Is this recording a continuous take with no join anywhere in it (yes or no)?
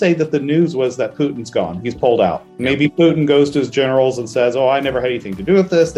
yes